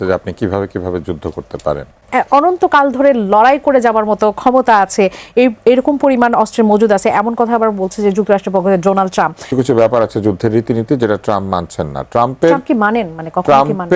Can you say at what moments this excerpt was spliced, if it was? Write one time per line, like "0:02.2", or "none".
0:02.0
0:09.4